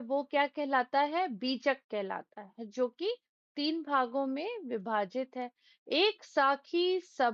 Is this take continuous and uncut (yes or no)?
yes